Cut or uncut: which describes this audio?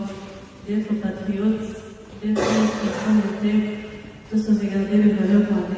cut